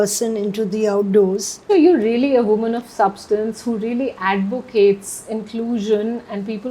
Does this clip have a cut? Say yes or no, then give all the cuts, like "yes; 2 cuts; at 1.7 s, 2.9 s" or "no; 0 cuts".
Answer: yes; 1 cut; at 1.5 s